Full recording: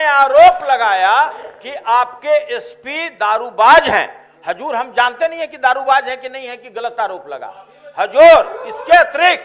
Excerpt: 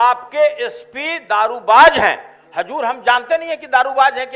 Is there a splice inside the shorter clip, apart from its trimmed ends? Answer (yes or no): no